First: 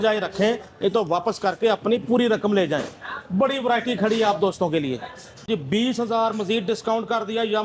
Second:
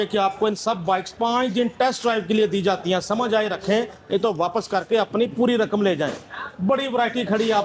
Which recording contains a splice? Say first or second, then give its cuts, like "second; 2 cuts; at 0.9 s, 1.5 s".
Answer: first; 1 cut; at 5.5 s